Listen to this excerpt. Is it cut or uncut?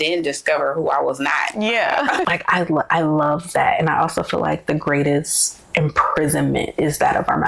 cut